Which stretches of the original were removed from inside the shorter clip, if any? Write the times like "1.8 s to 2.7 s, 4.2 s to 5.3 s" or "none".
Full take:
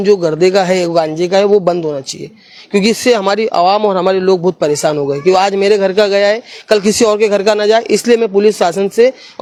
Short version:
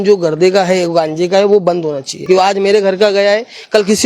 2.2 s to 5.2 s